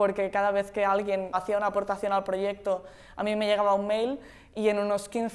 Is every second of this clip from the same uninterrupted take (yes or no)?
no